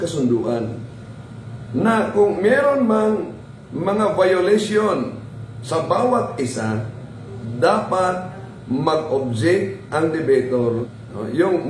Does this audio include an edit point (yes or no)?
yes